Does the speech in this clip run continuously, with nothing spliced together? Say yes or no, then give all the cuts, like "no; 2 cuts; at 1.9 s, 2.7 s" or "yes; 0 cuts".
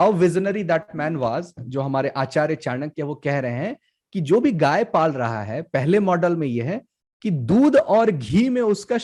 yes; 0 cuts